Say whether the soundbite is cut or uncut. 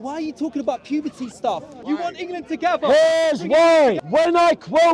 cut